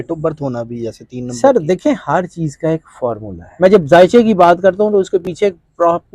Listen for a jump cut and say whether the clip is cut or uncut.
cut